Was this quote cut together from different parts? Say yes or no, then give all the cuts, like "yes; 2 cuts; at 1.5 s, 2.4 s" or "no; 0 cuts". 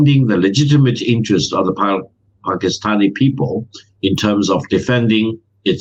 no; 0 cuts